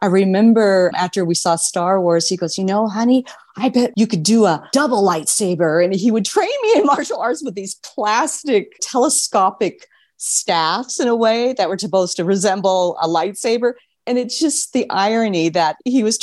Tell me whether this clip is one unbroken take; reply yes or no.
no